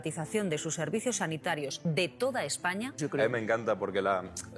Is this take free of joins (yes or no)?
no